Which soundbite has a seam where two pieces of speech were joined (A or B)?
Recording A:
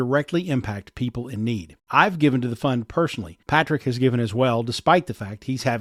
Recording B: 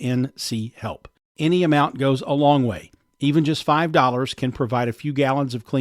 B